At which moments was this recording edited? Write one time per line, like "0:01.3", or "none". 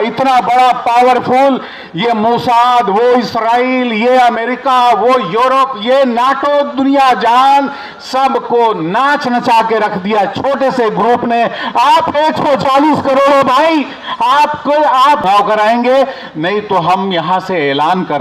0:15.2